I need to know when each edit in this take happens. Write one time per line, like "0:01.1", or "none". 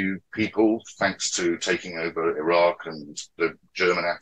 0:03.3